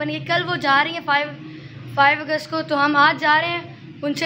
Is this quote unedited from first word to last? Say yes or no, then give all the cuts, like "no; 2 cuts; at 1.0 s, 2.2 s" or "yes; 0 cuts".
yes; 0 cuts